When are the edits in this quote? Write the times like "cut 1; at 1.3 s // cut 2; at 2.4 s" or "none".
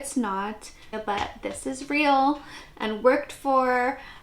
cut 1; at 0.9 s